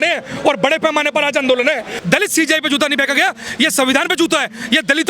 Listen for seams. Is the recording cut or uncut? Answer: cut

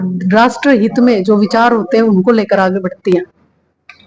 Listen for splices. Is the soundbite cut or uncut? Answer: uncut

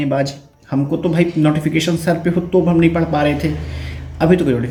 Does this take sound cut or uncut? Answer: uncut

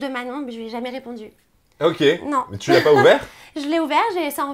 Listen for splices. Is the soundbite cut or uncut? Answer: uncut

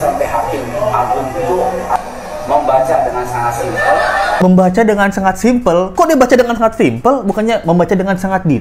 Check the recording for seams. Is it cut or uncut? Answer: cut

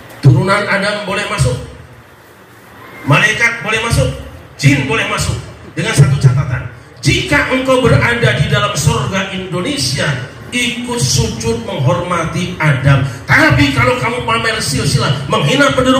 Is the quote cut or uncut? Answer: uncut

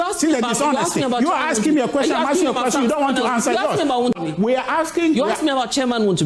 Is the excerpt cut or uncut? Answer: uncut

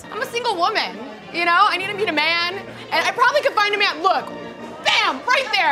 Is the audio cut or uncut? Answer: uncut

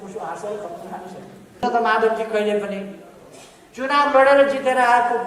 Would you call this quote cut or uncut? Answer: cut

